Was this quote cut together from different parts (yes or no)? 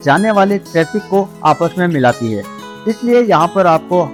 no